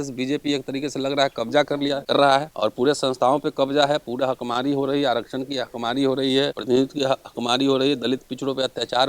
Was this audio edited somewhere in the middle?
yes; 2 cuts; at 2.2 s, 6.6 s

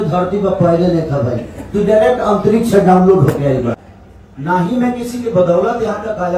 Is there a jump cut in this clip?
yes; 1 cut; at 3.8 s

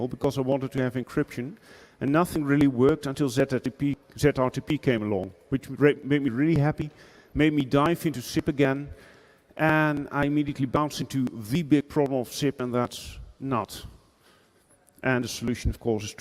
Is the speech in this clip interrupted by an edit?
no; 0 cuts

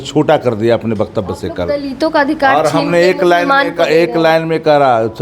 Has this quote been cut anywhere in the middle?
no; 0 cuts

